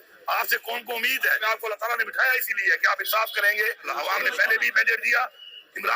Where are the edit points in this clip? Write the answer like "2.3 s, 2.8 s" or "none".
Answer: 1.4 s, 3.8 s